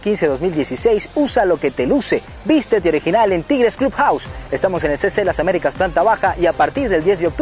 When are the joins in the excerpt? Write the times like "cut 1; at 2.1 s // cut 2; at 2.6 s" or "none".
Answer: none